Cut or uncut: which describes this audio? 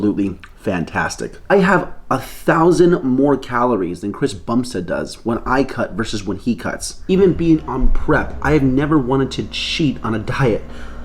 cut